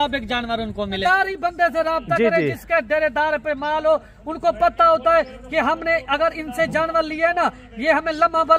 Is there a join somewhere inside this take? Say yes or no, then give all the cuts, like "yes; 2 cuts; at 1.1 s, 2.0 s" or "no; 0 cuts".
yes; 1 cut; at 1.0 s